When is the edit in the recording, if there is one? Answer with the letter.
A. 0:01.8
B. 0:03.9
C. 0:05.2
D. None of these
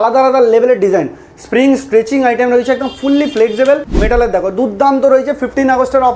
B